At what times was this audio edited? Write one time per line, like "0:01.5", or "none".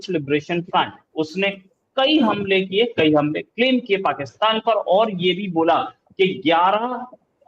0:01.0